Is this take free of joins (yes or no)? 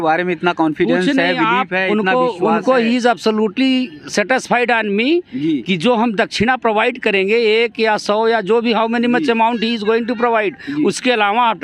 yes